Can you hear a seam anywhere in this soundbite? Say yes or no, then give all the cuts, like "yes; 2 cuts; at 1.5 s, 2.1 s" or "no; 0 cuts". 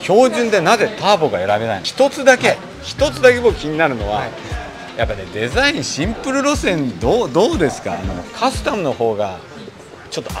yes; 2 cuts; at 1.8 s, 8.3 s